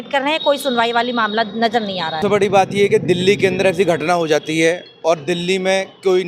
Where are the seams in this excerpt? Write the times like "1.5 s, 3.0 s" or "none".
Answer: 2.2 s